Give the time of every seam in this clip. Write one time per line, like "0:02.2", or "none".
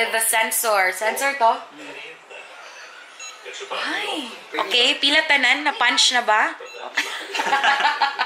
0:04.4